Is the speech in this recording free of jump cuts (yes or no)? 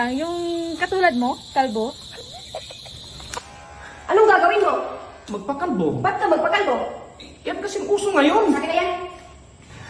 yes